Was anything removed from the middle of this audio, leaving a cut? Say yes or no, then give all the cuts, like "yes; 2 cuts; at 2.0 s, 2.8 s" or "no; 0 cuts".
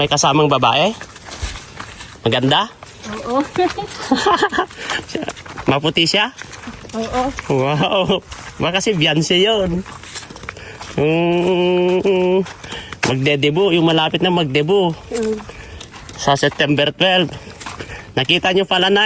no; 0 cuts